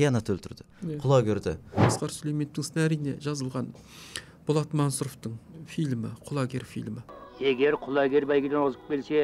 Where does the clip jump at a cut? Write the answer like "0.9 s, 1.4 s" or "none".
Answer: 1.9 s, 6.9 s